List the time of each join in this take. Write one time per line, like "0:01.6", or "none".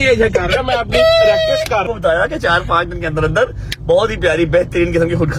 0:01.9